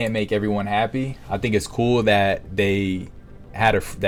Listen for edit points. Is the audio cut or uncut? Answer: uncut